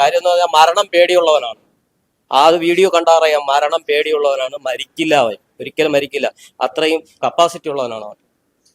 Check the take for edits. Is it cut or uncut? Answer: uncut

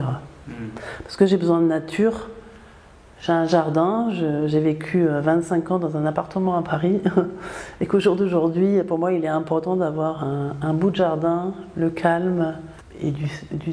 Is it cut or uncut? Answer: uncut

